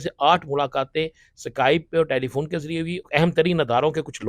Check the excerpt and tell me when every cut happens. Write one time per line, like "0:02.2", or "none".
0:03.0